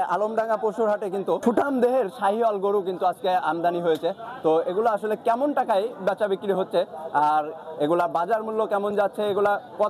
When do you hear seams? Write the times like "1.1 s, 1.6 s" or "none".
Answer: 1.4 s